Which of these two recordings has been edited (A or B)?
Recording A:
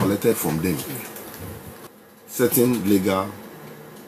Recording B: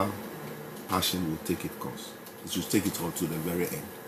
A